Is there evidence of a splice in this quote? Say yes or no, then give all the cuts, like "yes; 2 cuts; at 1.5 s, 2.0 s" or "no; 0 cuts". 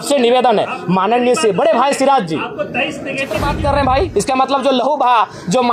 yes; 1 cut; at 3.4 s